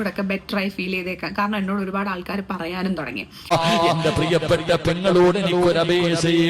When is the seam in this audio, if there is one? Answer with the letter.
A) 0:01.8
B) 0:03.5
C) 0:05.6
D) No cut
B